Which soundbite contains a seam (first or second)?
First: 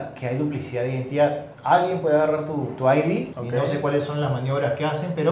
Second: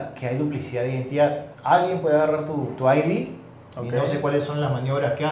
first